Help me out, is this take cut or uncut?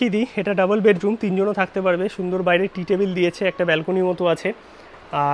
uncut